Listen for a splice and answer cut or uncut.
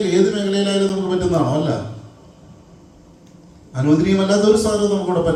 uncut